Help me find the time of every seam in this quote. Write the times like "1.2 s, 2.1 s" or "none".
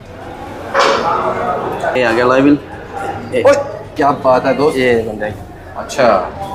1.9 s